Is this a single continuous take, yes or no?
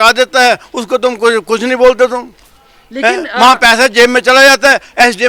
yes